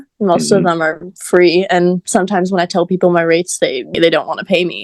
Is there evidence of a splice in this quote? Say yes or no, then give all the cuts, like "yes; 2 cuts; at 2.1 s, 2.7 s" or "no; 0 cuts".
yes; 1 cut; at 3.9 s